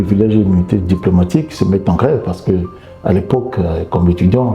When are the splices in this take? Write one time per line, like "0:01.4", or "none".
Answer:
none